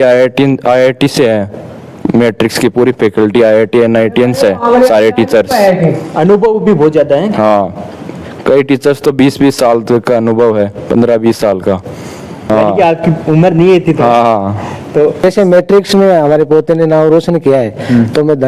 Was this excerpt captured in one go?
no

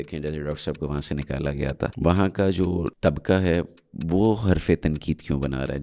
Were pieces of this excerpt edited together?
yes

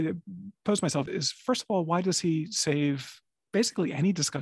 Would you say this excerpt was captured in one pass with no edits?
no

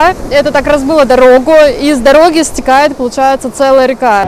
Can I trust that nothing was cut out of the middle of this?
yes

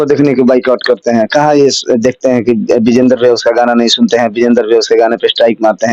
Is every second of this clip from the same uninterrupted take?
yes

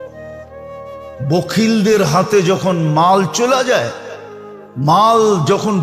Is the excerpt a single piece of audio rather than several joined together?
no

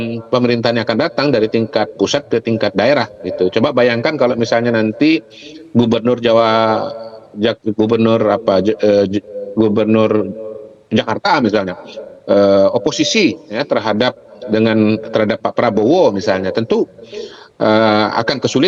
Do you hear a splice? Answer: no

